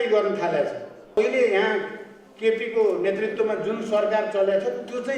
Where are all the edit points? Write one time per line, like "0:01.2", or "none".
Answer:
0:01.2